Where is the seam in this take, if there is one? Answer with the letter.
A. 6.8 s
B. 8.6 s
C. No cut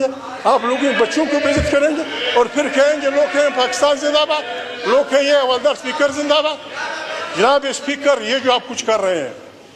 C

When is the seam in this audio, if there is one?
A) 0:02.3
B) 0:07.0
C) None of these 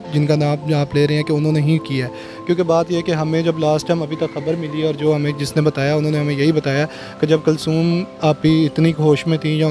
C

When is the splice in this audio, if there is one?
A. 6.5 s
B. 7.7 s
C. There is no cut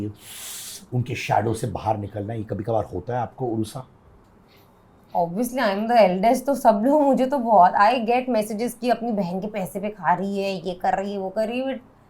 C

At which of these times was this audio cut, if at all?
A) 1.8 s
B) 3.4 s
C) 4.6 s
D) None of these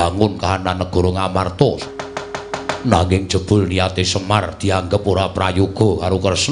A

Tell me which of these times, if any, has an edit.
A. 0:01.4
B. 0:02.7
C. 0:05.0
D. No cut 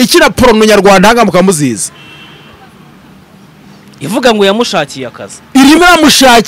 D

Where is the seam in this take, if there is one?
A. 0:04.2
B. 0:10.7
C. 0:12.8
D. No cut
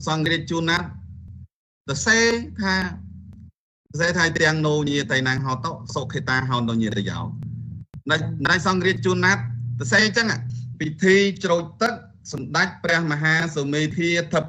B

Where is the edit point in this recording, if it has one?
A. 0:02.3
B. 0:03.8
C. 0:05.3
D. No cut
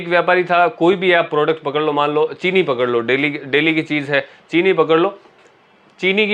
D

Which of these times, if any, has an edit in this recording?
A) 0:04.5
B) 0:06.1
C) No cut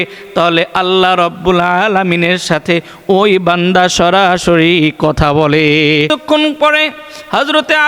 B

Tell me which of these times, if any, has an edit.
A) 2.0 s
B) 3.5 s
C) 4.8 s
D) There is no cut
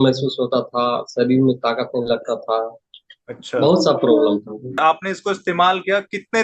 C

